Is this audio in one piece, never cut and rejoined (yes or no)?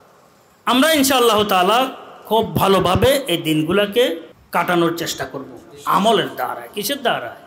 no